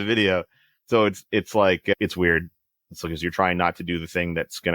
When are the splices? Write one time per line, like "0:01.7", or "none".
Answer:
none